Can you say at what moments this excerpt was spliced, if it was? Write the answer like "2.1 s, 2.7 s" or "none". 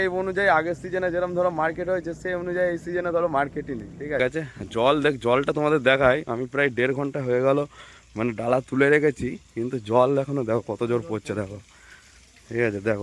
4.2 s